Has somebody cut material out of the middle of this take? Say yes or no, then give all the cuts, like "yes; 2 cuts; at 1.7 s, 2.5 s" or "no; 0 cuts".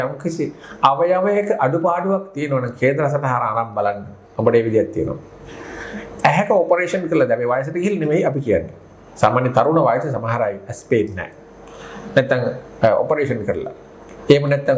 no; 0 cuts